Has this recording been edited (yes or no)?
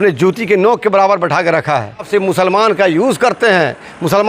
yes